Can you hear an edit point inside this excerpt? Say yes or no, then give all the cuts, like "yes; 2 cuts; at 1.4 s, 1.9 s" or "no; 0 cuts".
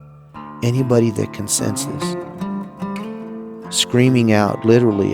yes; 2 cuts; at 2.2 s, 3.6 s